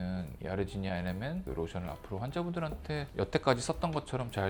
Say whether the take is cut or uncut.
uncut